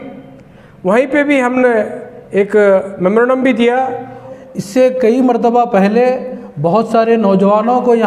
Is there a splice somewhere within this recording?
yes; 1 cut; at 4.3 s

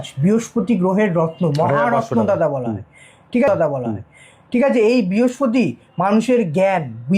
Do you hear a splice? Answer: no; 0 cuts

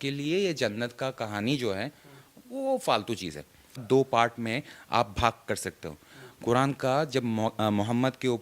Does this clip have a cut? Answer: yes; 1 cut; at 3.8 s

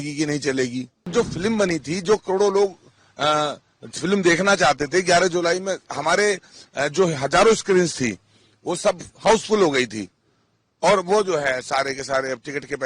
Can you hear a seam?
yes; 1 cut; at 1.1 s

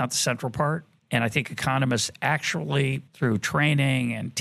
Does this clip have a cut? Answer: yes; 2 cuts; at 0.9 s, 3.1 s

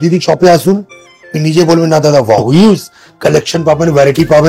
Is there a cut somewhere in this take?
yes; 1 cut; at 2.5 s

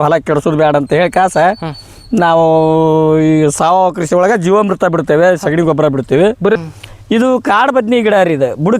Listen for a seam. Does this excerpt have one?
yes; 1 cut; at 6.6 s

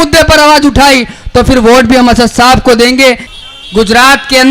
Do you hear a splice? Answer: yes; 1 cut; at 3.3 s

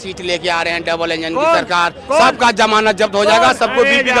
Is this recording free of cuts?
yes; 0 cuts

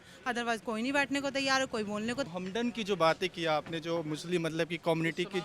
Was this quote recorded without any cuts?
no; 1 cut; at 2.3 s

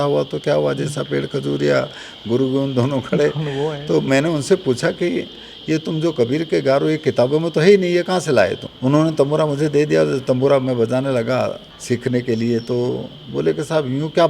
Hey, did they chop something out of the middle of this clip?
yes; 2 cuts; at 8.7 s, 11.7 s

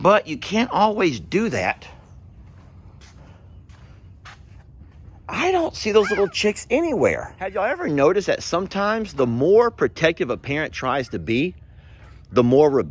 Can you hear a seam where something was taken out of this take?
yes; 1 cut; at 7.6 s

